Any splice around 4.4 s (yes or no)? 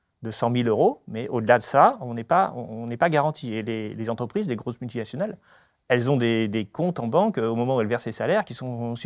no